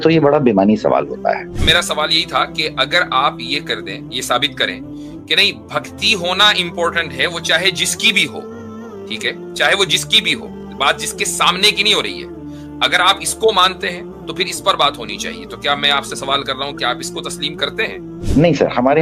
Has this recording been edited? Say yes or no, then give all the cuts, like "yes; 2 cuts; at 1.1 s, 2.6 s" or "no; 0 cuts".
yes; 2 cuts; at 1.6 s, 18.1 s